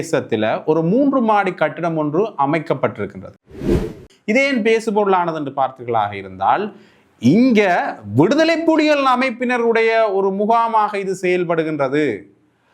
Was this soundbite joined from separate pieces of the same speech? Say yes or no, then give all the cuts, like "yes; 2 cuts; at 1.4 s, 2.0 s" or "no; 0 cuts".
yes; 1 cut; at 3.8 s